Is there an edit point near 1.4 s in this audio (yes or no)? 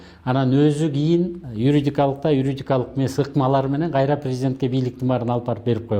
yes